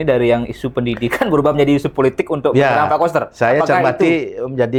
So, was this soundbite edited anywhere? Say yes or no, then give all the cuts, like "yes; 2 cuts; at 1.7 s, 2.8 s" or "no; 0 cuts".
no; 0 cuts